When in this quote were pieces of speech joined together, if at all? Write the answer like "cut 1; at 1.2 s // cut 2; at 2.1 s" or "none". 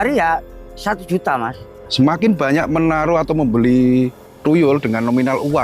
cut 1; at 1.7 s // cut 2; at 4.4 s